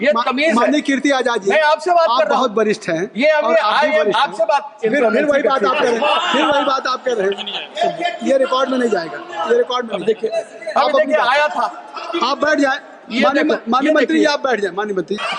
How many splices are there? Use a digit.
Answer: 0